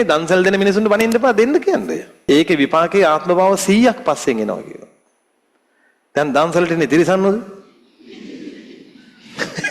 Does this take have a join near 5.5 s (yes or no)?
no